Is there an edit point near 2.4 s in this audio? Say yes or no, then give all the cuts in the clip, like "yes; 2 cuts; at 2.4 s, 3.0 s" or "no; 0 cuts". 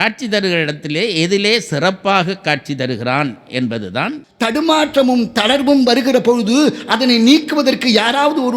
no; 1 cut; at 4.2 s